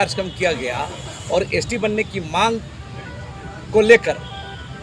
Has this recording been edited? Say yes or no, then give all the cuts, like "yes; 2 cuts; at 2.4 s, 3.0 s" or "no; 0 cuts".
no; 0 cuts